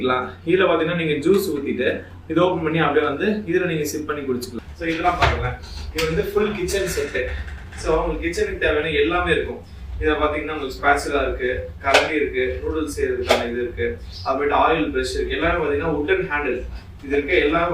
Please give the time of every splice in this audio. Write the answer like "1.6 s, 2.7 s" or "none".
4.5 s